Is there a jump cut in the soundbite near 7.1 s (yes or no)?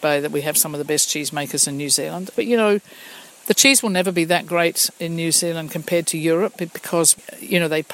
yes